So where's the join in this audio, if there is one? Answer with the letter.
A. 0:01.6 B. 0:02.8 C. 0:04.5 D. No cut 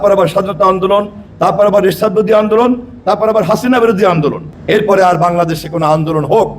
C